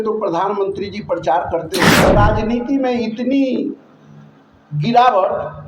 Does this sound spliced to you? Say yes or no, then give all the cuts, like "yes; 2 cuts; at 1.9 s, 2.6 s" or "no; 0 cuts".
yes; 1 cut; at 2.1 s